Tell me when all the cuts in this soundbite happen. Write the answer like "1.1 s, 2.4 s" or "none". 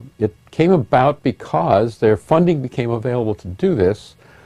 3.2 s